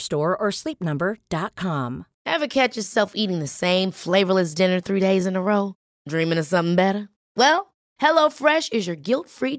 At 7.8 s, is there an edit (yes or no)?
no